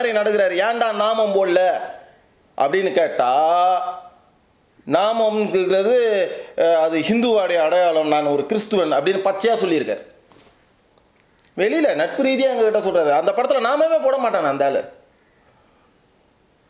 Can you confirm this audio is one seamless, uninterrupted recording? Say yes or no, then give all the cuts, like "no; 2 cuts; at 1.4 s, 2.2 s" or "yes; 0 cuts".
yes; 0 cuts